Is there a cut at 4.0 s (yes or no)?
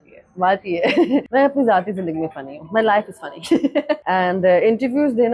yes